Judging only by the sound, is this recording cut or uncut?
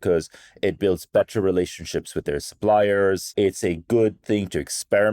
cut